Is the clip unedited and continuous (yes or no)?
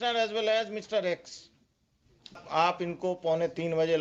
no